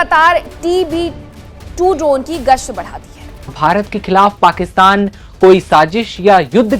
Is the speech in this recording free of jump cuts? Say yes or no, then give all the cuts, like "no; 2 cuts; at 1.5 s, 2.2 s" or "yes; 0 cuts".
no; 1 cut; at 3.5 s